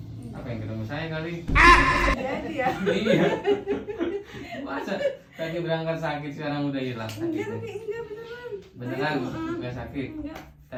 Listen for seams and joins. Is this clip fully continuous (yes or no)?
yes